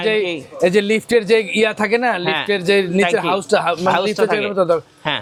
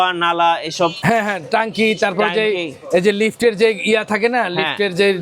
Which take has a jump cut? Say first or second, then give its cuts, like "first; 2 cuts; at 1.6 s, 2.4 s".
second; 1 cut; at 1.0 s